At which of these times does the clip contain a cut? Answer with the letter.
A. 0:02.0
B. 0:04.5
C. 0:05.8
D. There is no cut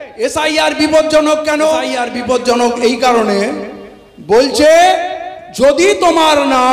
A